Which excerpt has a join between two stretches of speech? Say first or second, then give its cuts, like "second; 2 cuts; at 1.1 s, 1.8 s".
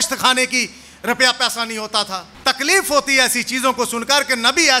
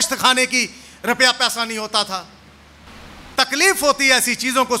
first; 1 cut; at 2.3 s